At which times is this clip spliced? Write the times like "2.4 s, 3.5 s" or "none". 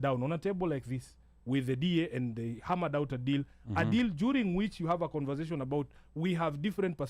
none